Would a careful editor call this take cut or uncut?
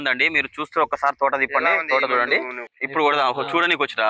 cut